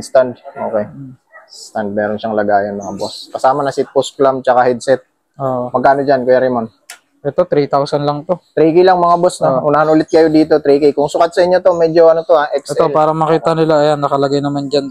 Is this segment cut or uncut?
uncut